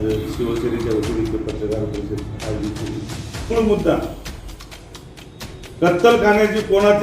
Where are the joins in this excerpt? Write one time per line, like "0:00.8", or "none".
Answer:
0:03.5